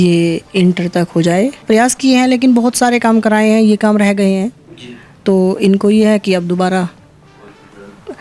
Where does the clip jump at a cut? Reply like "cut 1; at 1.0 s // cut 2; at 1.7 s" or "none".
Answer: none

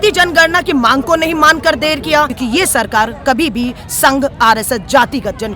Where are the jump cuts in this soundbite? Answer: cut 1; at 2.3 s

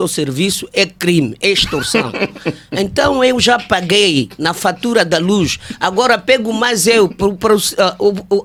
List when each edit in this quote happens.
none

